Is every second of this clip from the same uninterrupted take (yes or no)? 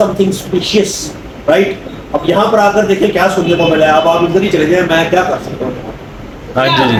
yes